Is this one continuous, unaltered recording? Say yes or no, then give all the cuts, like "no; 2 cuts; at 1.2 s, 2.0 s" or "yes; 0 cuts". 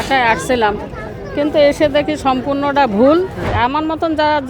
no; 1 cut; at 3.5 s